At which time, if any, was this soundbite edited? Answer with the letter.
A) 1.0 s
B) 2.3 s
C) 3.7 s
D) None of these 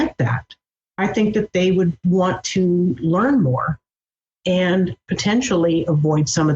A